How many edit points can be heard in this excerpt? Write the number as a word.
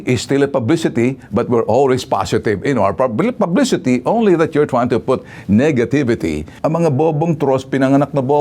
one